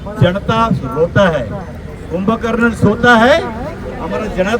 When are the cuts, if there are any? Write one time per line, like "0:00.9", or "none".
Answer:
none